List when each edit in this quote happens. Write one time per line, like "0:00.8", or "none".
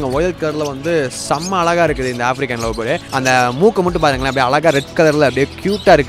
0:03.0